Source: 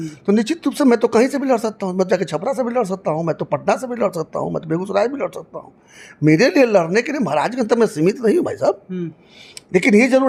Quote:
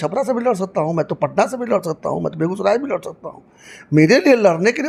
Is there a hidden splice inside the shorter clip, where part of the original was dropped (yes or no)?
no